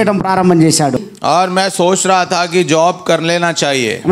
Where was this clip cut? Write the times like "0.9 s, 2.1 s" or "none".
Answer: 1.0 s